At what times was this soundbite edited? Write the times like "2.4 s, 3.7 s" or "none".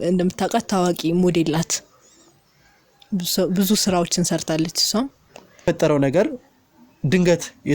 5.6 s